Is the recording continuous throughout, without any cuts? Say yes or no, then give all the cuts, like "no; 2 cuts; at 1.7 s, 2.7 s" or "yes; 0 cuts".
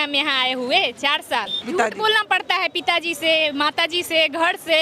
no; 1 cut; at 1.6 s